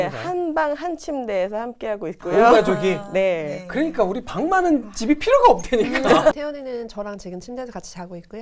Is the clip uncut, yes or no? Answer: no